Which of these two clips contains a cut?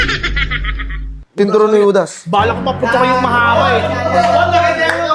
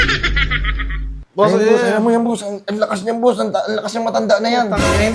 first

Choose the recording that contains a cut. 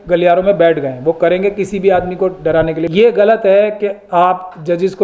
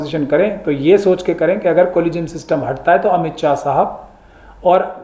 first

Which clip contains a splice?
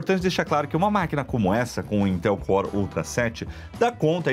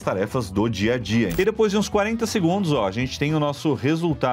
second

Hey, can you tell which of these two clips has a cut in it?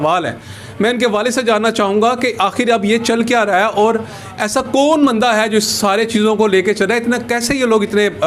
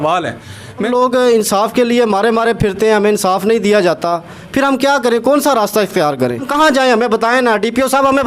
second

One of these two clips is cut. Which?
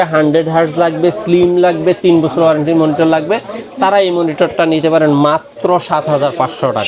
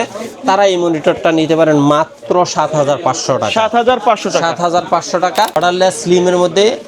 second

